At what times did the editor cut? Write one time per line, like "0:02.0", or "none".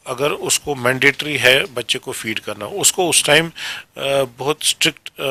none